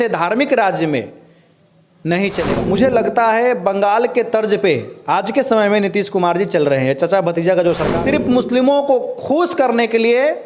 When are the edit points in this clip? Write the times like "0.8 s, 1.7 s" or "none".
2.4 s, 7.9 s